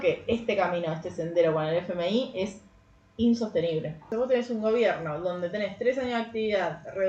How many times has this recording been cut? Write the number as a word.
one